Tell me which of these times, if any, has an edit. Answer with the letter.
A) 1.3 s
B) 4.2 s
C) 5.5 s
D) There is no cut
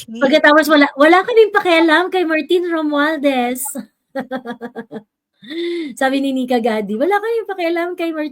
D